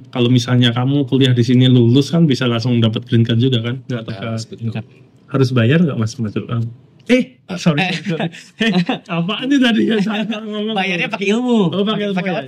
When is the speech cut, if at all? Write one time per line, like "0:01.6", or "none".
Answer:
0:04.1